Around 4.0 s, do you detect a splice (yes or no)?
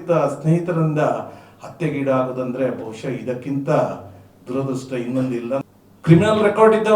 no